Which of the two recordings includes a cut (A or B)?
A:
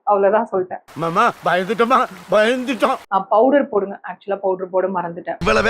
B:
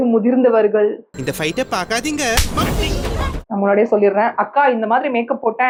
A